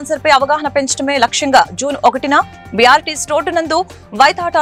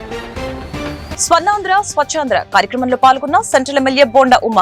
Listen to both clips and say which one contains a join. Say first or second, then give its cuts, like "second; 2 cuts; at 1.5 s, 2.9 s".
second; 1 cut; at 1.1 s